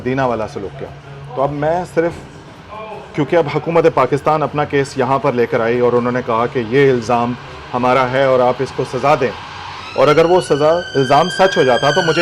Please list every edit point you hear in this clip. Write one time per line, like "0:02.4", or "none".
none